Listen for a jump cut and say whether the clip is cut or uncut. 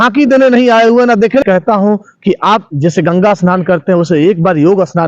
cut